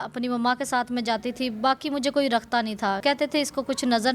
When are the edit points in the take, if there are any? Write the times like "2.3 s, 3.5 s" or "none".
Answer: 3.0 s